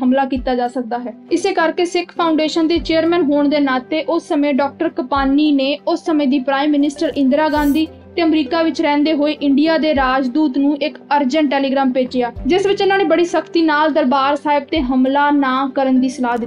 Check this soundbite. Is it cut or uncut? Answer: uncut